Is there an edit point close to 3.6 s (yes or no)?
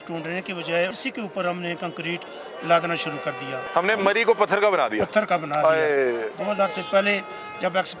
yes